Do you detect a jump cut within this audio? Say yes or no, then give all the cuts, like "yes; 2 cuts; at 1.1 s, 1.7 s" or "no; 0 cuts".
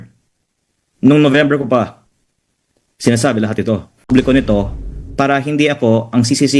yes; 1 cut; at 4.1 s